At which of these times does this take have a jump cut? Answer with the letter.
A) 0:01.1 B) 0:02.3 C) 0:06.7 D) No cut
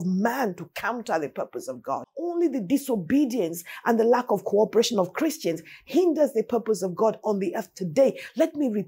B